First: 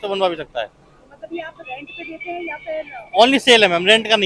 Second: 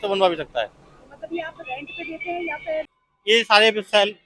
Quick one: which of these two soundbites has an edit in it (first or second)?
second